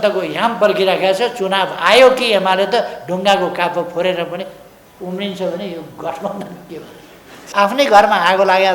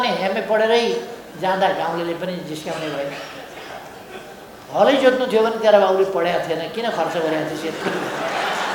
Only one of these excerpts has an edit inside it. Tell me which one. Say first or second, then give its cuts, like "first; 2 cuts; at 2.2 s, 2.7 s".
first; 1 cut; at 7.4 s